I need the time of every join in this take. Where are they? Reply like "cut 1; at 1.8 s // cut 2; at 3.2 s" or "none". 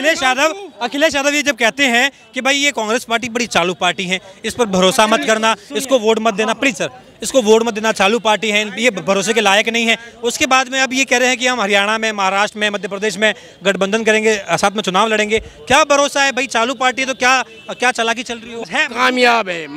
cut 1; at 18.6 s